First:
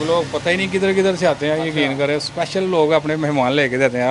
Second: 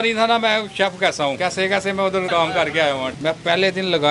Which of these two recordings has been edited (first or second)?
second